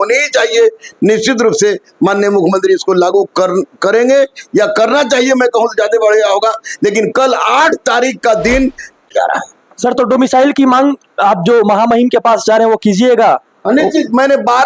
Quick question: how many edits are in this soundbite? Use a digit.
1